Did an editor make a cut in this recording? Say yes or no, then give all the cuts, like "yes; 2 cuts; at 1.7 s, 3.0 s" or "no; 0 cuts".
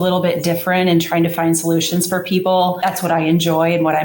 yes; 1 cut; at 2.8 s